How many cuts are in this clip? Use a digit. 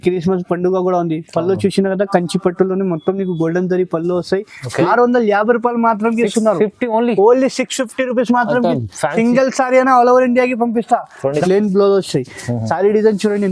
2